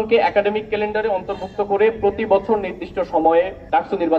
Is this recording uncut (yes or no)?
yes